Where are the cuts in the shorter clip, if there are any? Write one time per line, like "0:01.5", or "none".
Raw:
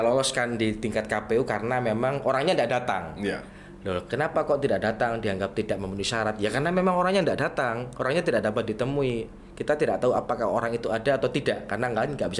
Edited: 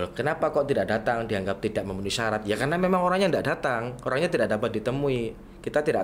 none